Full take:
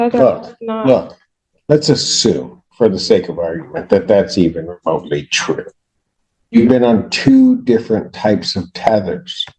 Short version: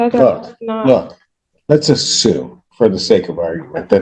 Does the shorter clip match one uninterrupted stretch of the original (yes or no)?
yes